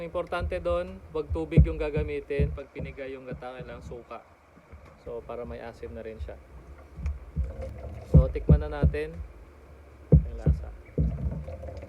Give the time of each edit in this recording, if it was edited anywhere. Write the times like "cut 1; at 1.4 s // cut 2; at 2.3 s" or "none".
cut 1; at 7.7 s